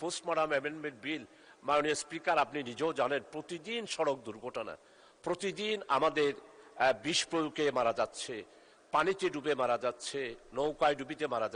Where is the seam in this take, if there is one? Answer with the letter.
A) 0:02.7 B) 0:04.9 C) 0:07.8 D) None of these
D